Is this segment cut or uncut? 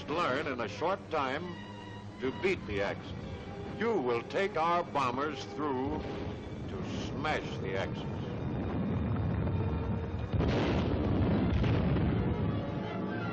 cut